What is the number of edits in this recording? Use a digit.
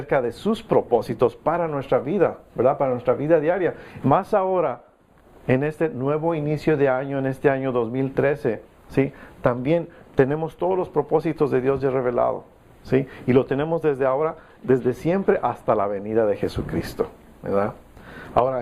0